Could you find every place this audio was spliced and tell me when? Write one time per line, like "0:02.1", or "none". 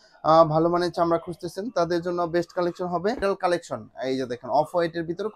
0:03.2